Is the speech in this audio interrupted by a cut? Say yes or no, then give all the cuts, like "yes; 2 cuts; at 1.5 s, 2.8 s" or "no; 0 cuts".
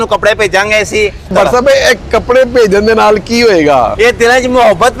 yes; 1 cut; at 1.3 s